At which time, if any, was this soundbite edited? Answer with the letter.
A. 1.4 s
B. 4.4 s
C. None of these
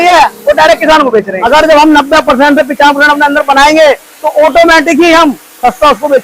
A